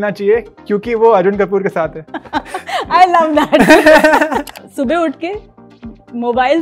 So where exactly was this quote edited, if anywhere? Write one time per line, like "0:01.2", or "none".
0:04.5